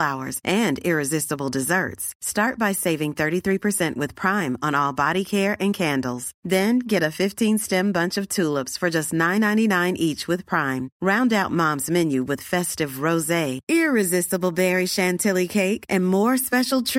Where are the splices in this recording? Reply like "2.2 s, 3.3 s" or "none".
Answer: none